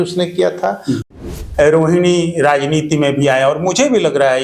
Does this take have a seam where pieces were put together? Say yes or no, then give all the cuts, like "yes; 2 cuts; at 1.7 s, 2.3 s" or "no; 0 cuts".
yes; 1 cut; at 1.2 s